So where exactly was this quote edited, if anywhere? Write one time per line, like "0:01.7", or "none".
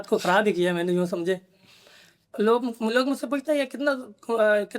0:02.3